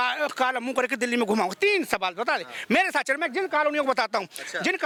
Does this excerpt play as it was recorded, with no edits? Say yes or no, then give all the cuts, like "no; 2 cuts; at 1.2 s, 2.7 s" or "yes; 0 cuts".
yes; 0 cuts